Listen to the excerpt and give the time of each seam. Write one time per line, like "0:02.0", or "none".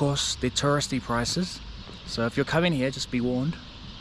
none